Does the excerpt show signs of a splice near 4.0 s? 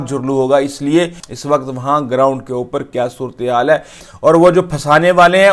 yes; 2 cuts; at 1.2 s, 4.0 s

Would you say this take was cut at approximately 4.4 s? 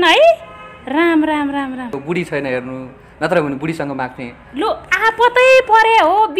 no; 1 cut; at 2.0 s

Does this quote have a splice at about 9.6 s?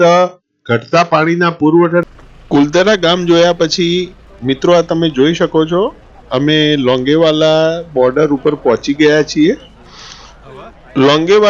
no; 1 cut; at 2.0 s

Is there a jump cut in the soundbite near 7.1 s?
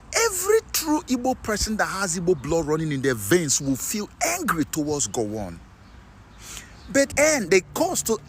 yes; 1 cut; at 7.1 s

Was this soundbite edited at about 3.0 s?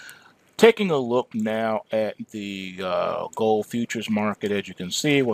no; 1 cut; at 1.3 s

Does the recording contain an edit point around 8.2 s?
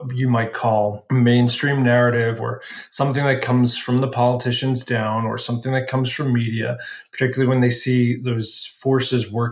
yes; 2 cuts; at 1.0 s, 8.2 s

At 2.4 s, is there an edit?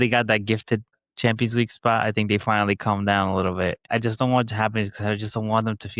no; 2 cuts; at 1.0 s, 3.9 s

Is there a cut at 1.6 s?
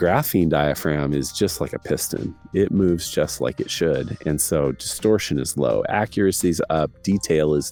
no; 0 cuts

